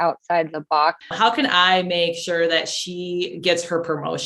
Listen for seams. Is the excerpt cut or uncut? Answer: cut